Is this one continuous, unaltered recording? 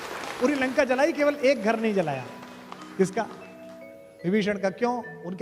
yes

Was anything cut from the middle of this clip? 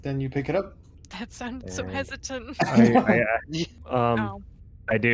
yes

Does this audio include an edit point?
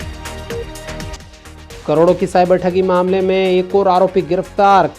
yes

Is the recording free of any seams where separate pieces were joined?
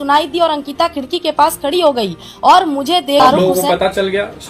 no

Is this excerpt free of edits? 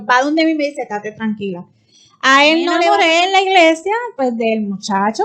no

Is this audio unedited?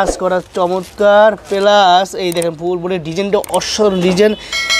yes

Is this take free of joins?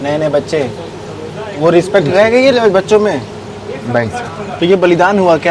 no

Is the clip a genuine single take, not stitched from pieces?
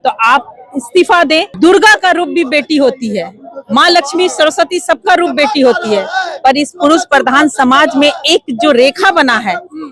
no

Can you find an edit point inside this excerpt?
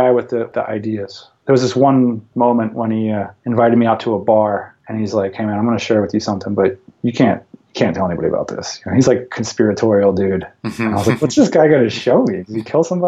yes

